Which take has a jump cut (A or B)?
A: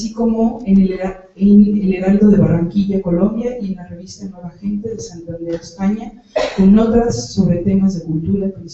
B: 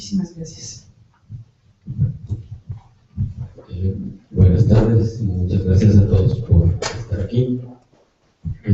A